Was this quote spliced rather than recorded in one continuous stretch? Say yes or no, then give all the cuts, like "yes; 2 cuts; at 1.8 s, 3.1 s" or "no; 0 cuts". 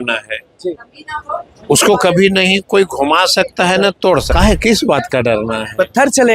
yes; 1 cut; at 4.3 s